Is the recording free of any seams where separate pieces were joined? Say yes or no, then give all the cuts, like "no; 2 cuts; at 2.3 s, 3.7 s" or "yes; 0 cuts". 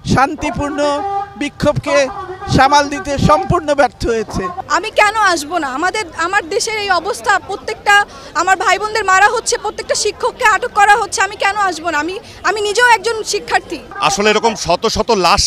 no; 2 cuts; at 4.6 s, 13.8 s